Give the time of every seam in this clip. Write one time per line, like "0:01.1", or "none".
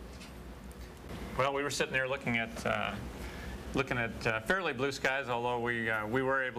0:04.2